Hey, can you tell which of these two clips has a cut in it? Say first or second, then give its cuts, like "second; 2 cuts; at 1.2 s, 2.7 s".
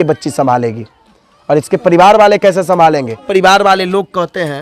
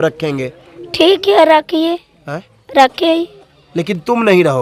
first; 1 cut; at 3.3 s